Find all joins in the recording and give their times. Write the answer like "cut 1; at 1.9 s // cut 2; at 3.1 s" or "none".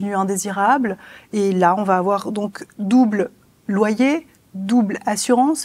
none